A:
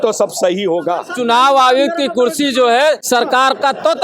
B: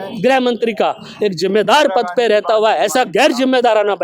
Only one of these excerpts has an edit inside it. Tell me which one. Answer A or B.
A